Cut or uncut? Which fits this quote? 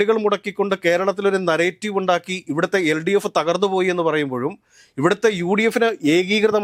uncut